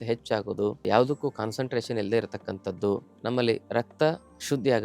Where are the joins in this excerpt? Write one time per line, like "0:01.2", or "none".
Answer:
0:03.1